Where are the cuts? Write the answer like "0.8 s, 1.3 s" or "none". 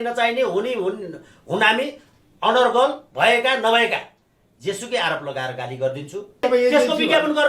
6.4 s